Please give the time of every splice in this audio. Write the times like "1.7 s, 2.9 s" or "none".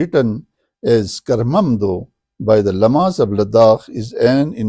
none